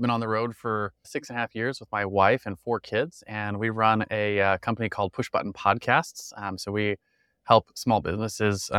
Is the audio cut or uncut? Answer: cut